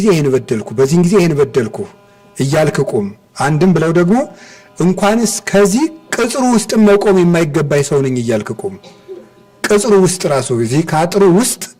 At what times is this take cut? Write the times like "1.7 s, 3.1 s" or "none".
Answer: none